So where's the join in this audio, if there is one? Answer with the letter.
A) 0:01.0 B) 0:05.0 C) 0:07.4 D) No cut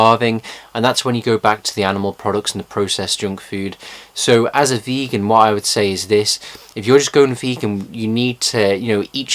A